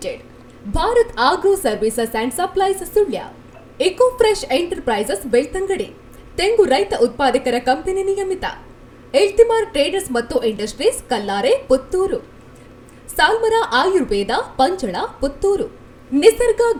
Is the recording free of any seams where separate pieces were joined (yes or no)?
yes